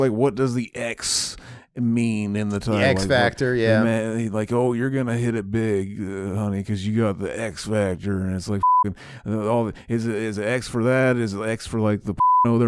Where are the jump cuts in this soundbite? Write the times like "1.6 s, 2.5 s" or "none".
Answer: none